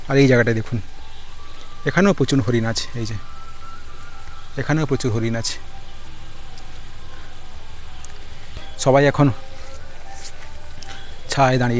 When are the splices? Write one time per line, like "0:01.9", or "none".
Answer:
none

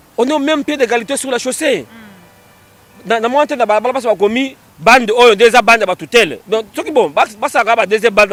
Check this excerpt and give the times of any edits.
none

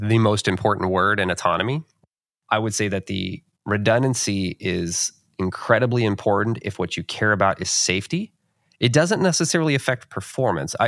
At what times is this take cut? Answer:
0:02.1

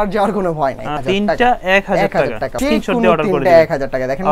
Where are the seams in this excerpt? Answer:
0:00.9
0:02.5

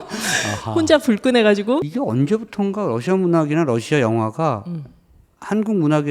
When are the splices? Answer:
0:01.9

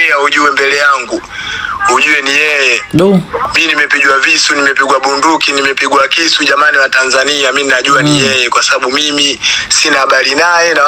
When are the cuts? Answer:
none

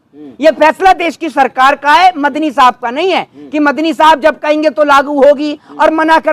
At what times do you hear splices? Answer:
none

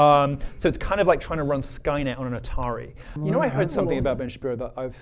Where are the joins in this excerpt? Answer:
0:03.1

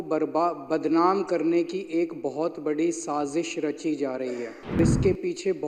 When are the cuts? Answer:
0:04.8

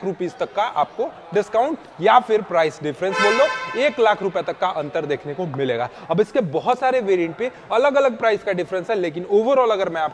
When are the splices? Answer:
none

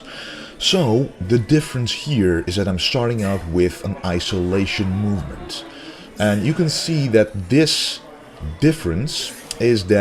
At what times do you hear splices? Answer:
0:08.4

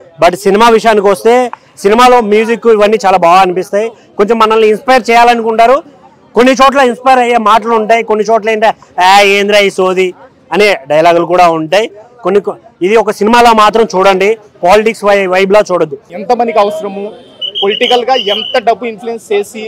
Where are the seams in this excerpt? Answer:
0:16.1

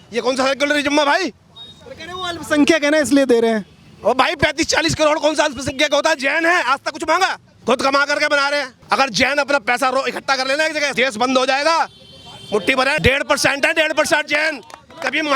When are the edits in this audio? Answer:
0:07.5
0:08.7
0:10.9
0:13.0

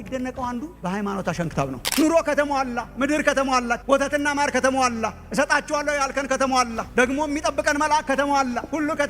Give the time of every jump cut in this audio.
0:01.9

